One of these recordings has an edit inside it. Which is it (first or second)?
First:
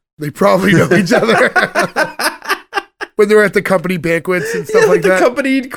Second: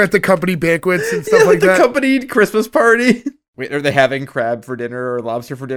second